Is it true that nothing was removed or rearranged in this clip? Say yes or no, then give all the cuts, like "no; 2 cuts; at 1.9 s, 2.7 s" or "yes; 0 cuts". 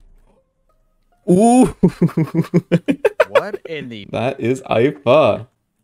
no; 1 cut; at 3.9 s